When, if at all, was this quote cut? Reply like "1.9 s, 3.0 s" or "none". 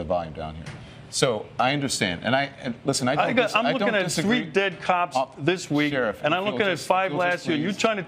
3.3 s